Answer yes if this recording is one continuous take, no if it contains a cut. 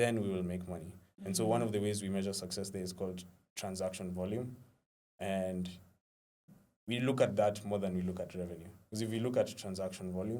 yes